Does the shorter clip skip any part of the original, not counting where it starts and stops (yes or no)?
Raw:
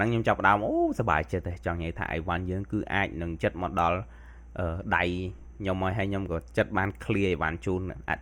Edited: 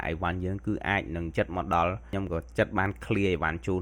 yes